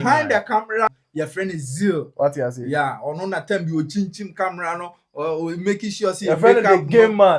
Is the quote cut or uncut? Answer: cut